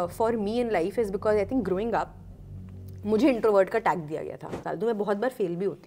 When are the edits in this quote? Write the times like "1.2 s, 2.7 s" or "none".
4.6 s